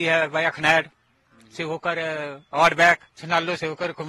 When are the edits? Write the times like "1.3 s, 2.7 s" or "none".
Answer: 3.1 s